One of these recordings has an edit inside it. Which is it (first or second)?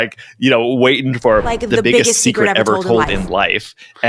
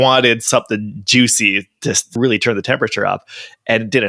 second